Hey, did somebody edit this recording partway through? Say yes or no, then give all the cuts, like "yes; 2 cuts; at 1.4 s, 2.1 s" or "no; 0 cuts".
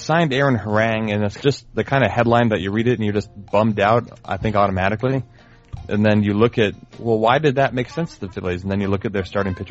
yes; 1 cut; at 1.3 s